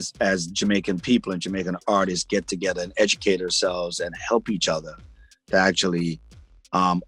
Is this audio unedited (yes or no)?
yes